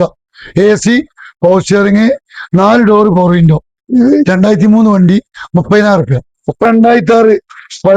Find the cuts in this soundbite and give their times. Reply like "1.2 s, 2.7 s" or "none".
3.7 s, 6.6 s